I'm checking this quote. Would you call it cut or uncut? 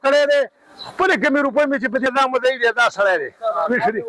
cut